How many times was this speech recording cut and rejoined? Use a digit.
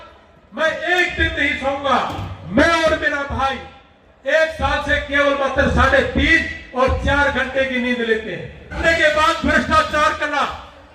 1